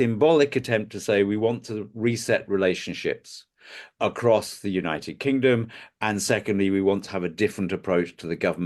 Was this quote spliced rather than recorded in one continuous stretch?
no; 0 cuts

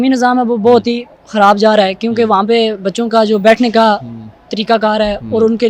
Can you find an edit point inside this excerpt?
no; 0 cuts

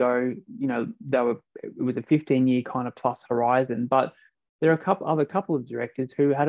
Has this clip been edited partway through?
no; 0 cuts

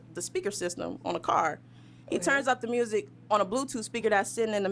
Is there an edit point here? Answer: no; 0 cuts

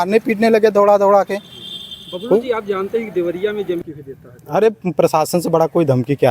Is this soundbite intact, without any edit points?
no; 1 cut; at 3.8 s

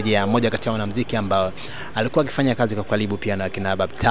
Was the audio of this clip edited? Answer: no; 0 cuts

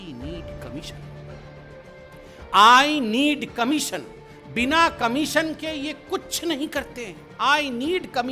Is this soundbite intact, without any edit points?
no; 2 cuts; at 0.9 s, 2.5 s

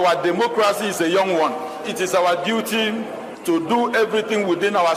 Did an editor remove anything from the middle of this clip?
yes; 1 cut; at 3.3 s

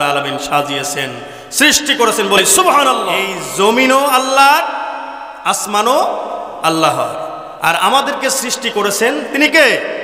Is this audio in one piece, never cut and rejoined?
no; 1 cut; at 3.4 s

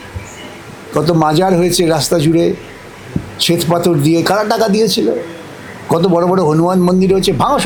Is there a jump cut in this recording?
no; 0 cuts

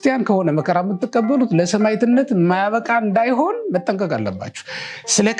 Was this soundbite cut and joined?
no; 0 cuts

